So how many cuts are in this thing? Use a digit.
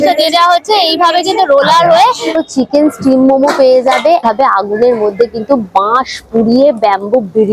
2